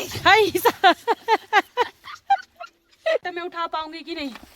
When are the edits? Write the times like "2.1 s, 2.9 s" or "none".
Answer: 3.3 s